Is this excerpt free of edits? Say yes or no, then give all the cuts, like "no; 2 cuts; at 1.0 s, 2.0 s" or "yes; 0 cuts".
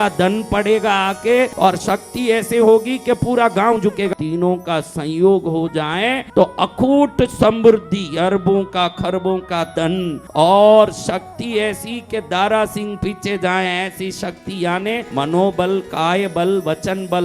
no; 5 cuts; at 1.5 s, 4.1 s, 6.2 s, 10.2 s, 15.1 s